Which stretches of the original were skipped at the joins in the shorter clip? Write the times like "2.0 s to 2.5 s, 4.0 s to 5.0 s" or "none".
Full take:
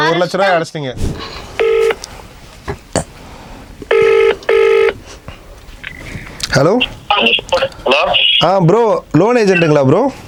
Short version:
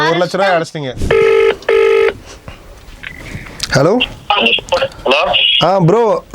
0.9 s to 3.7 s